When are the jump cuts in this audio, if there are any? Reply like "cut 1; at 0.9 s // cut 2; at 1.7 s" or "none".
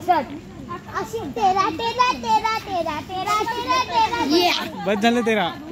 cut 1; at 4.6 s